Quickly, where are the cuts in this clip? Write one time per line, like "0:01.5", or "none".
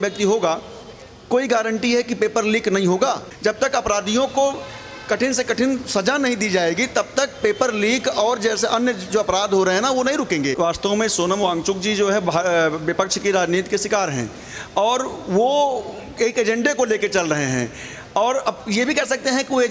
0:03.3
0:10.5